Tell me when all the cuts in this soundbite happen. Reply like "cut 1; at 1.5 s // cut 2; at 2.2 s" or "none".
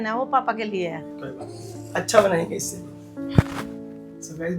cut 1; at 1.3 s